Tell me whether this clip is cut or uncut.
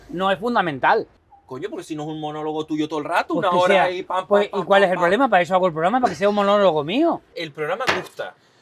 cut